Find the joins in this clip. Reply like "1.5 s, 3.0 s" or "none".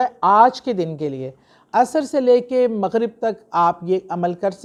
none